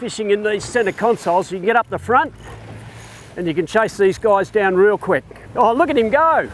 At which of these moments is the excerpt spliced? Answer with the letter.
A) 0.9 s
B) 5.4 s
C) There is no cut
B